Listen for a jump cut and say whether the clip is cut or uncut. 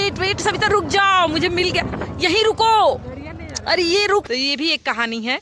cut